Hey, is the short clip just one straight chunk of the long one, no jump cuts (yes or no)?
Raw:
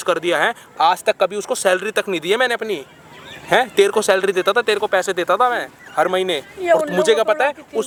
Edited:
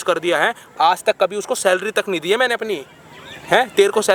yes